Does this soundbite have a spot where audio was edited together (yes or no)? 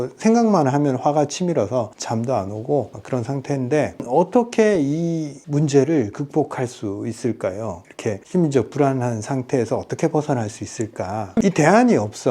yes